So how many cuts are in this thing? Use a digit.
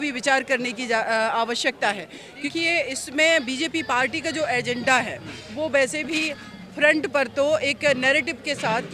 1